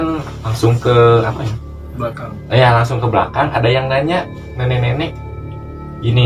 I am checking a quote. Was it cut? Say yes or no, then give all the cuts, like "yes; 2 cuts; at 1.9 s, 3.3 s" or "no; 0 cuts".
no; 0 cuts